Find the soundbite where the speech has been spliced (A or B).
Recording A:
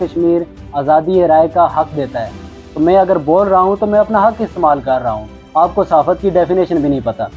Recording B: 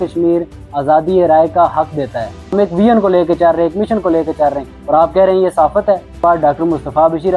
B